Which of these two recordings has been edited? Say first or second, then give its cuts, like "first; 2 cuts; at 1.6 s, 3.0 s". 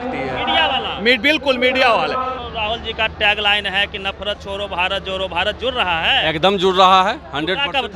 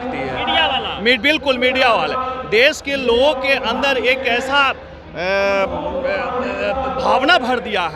first; 1 cut; at 2.4 s